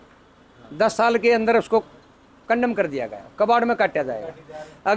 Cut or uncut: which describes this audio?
uncut